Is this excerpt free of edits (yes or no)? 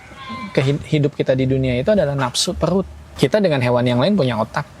no